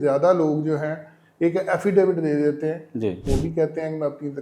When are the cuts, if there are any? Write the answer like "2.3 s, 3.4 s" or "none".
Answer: 3.2 s